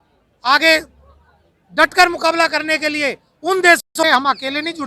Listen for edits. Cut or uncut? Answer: cut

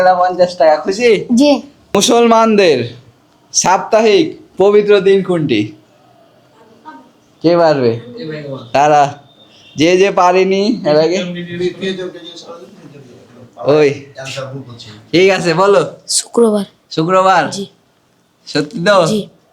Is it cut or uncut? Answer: cut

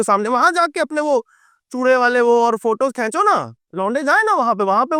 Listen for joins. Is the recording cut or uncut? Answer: uncut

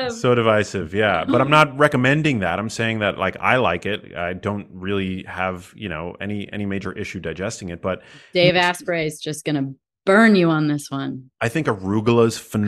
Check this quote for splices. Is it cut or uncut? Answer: uncut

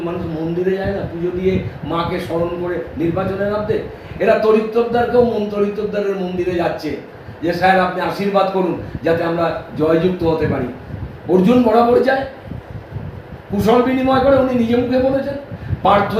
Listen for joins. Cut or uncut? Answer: uncut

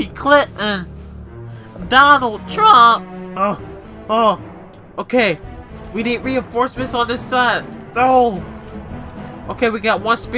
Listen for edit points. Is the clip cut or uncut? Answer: cut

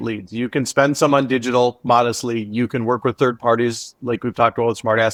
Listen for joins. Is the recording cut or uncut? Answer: uncut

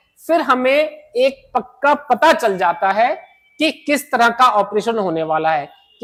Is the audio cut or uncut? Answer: uncut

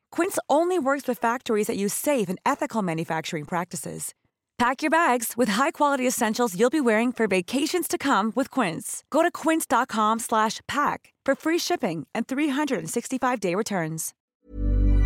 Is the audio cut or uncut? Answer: cut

